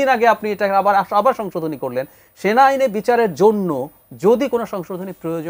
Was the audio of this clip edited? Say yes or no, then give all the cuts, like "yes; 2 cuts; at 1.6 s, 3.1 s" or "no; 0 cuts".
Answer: no; 0 cuts